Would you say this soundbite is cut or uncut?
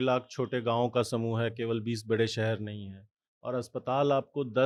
uncut